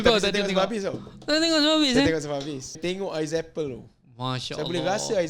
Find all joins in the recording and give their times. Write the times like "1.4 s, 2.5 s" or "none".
2.7 s